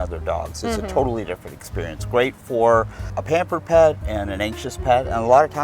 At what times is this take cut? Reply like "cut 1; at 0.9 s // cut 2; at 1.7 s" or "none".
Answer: cut 1; at 3.1 s